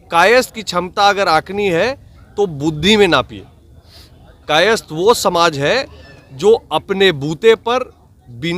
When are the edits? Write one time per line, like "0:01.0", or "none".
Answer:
none

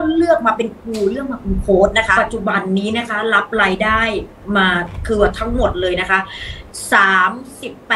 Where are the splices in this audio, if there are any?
0:02.1

